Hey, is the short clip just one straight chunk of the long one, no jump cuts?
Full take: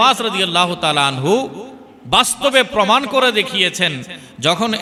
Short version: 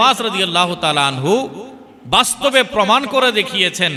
yes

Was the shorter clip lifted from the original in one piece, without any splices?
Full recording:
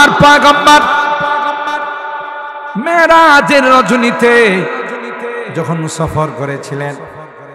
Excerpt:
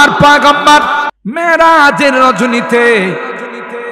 no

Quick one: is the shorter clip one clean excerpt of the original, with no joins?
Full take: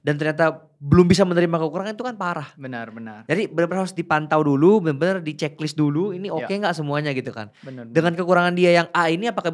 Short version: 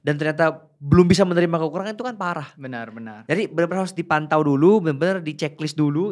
yes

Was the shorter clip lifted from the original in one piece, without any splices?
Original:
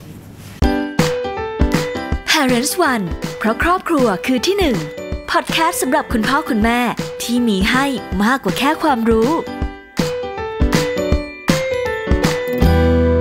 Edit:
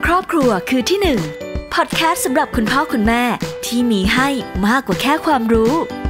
yes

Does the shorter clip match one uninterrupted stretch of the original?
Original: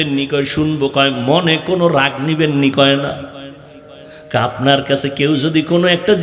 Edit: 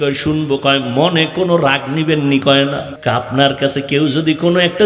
no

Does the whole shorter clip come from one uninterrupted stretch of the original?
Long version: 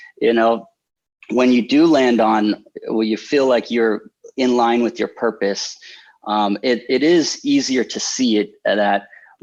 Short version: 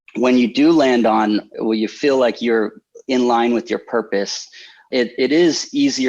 no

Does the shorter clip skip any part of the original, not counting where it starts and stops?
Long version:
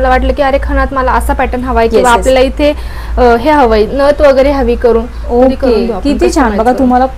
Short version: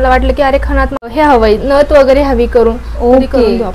yes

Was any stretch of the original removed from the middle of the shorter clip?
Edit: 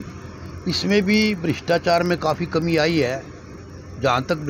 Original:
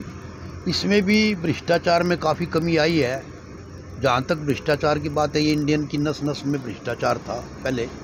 no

